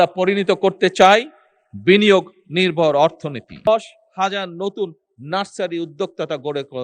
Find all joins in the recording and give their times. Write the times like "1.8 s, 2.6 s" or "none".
3.7 s

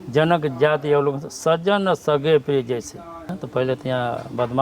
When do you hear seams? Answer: 3.3 s

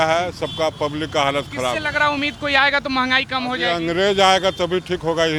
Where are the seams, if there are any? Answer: none

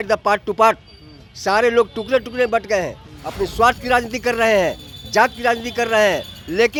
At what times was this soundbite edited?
none

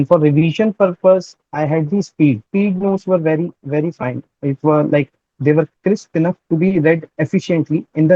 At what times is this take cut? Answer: 2.4 s, 7.1 s

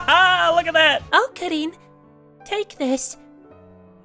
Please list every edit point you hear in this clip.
1.0 s

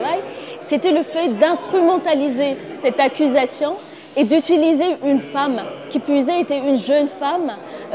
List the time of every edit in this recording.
2.7 s

